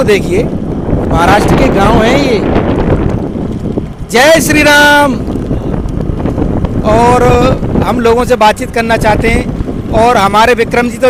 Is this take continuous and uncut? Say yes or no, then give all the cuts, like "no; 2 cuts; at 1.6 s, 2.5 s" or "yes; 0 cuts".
yes; 0 cuts